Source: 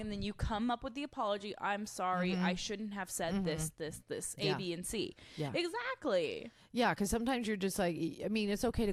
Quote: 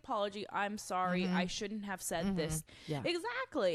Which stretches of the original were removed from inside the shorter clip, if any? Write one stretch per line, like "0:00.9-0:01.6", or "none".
0:03.8-0:05.2